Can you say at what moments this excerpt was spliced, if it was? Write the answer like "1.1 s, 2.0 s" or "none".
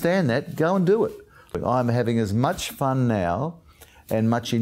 1.5 s